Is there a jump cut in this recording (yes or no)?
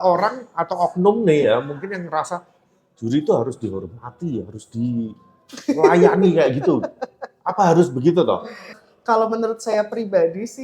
yes